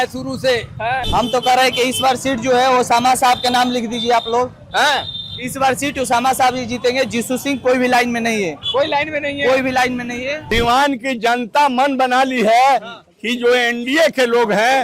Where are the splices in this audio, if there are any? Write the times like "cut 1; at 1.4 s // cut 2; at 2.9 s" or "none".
cut 1; at 1.0 s // cut 2; at 10.4 s